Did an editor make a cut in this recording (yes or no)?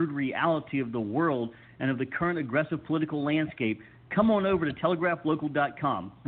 no